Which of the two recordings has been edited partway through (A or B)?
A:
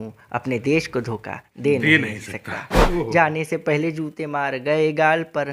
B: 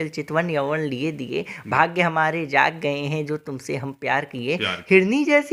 A